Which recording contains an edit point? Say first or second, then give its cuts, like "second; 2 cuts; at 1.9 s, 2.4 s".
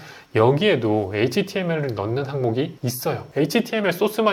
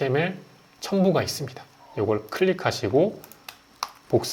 first; 1 cut; at 3.0 s